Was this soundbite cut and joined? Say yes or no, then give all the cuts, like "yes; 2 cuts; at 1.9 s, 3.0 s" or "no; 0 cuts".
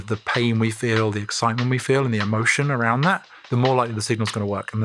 yes; 1 cut; at 3.3 s